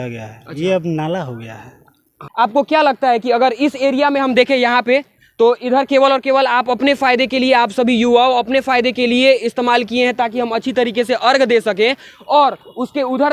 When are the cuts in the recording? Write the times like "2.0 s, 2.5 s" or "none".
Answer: 2.2 s